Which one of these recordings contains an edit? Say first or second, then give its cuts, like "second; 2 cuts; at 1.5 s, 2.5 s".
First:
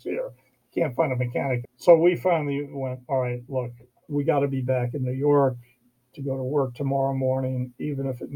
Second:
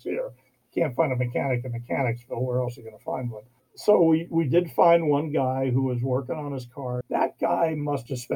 first; 2 cuts; at 1.7 s, 4.1 s